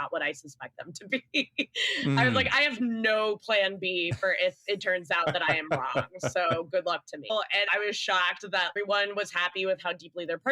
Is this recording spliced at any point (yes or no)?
yes